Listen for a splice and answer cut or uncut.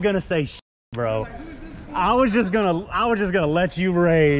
uncut